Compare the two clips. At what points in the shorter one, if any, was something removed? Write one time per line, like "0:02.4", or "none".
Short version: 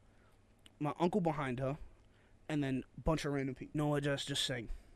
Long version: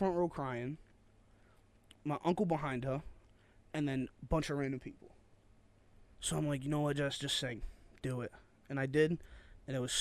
0:03.7